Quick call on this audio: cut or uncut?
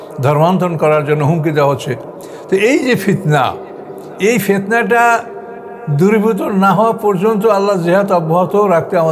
uncut